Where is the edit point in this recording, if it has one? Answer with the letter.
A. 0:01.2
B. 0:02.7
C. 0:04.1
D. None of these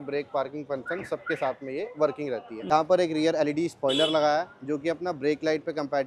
B